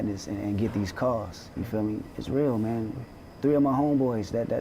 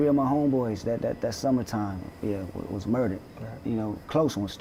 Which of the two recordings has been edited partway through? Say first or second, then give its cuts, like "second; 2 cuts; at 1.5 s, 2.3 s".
first; 1 cut; at 2.1 s